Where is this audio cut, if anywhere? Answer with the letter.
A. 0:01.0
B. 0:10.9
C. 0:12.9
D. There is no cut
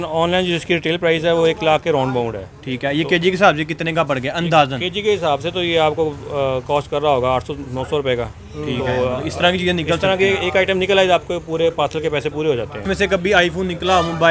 C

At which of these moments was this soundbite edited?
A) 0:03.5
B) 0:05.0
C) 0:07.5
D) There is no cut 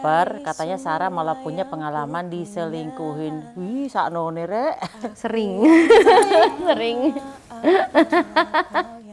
D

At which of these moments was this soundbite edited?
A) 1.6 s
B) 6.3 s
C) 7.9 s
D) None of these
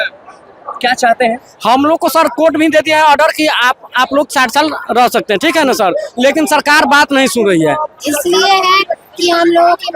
C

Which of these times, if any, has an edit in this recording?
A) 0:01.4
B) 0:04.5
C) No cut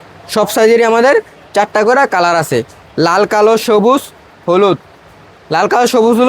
C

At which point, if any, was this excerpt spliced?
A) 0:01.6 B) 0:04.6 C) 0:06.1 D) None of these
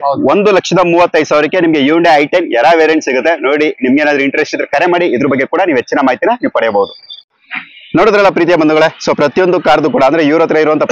D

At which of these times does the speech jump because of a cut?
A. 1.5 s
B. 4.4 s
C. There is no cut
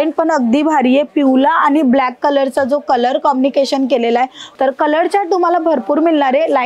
B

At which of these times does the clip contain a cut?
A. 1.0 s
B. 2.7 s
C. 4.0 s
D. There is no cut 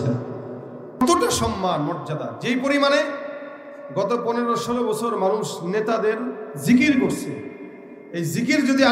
A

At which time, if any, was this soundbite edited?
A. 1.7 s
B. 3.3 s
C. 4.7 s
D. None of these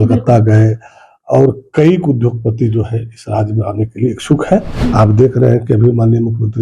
C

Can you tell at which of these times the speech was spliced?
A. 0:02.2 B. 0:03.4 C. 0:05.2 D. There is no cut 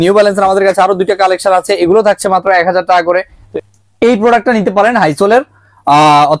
B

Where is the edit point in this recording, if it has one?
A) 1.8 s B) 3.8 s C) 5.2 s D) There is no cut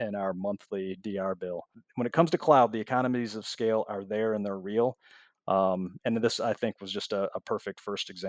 A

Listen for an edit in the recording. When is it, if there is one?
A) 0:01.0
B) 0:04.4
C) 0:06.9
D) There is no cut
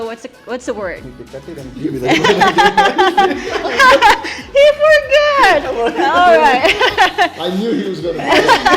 A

